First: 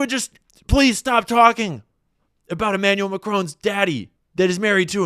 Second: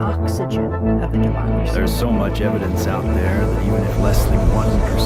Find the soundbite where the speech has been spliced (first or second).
first